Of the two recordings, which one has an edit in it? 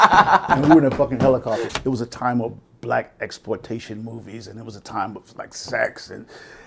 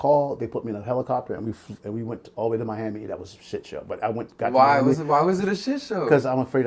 first; 1 cut; at 1.7 s

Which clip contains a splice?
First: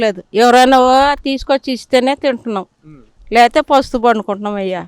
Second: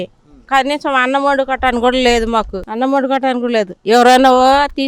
second; 1 cut; at 2.6 s

